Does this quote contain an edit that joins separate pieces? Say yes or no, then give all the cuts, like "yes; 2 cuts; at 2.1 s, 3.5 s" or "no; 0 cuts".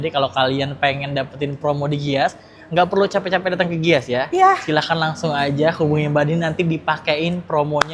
no; 0 cuts